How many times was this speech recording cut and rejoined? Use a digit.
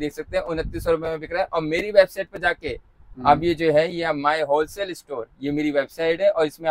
0